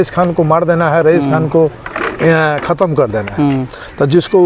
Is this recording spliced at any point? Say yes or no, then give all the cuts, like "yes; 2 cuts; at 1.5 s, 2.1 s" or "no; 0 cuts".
no; 0 cuts